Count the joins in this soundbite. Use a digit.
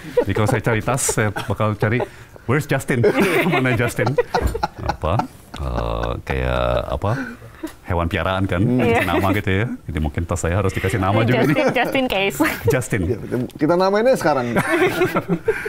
0